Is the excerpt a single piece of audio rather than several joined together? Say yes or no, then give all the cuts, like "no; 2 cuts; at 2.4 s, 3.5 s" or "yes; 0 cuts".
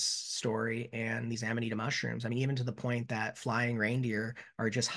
yes; 0 cuts